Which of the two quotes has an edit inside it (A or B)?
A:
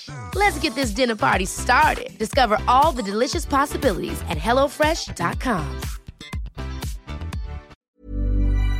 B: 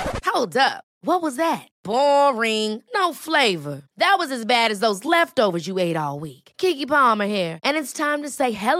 A